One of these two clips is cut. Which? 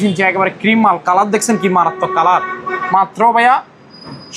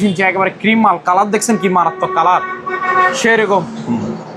first; 1 cut; at 2.7 s

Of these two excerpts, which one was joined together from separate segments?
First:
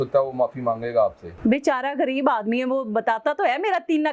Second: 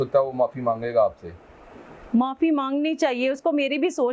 first; 1 cut; at 1.3 s

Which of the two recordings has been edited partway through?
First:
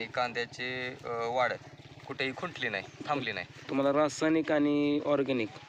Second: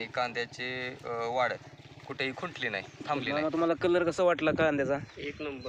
second; 1 cut; at 3.3 s

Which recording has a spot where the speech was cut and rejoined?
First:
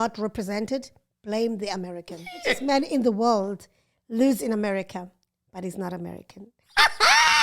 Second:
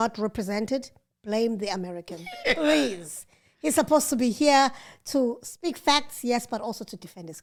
first; 1 cut; at 2.6 s

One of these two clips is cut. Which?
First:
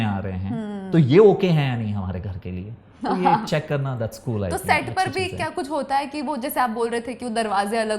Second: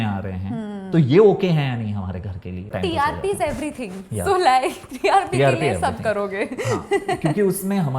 second; 1 cut; at 2.7 s

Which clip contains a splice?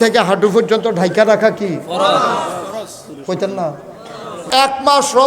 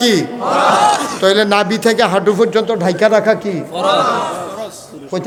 first; 1 cut; at 4.4 s

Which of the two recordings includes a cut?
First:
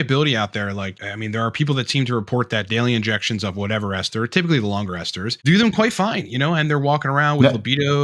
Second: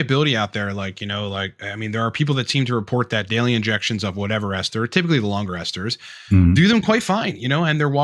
first; 2 cuts; at 1.0 s, 5.5 s

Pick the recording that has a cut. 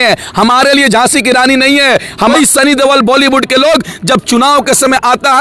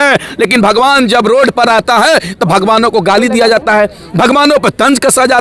first; 1 cut; at 2.3 s

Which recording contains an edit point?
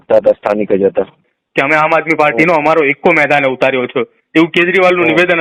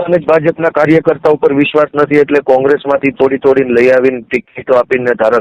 first; 1 cut; at 1.2 s

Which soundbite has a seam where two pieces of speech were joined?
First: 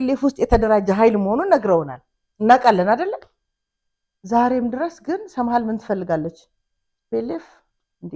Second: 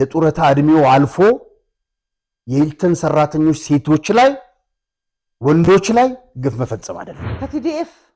second; 1 cut; at 7.2 s

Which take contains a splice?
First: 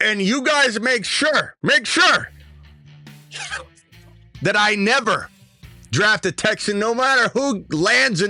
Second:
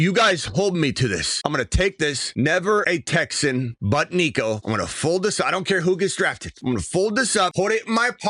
second; 7 cuts; at 1.3 s, 2.2 s, 2.9 s, 3.7 s, 4.6 s, 6.5 s, 7.5 s

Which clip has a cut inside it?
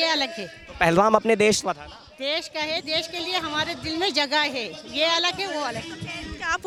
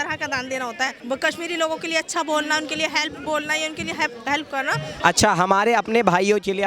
second; 2 cuts; at 1.0 s, 5.0 s

